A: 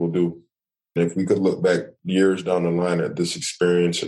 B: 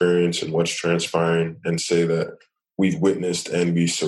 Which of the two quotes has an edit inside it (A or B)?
A